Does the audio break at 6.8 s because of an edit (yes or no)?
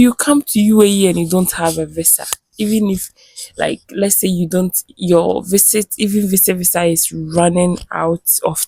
no